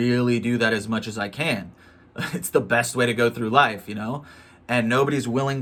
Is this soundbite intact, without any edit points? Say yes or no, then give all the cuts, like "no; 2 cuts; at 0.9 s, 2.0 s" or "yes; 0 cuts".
yes; 0 cuts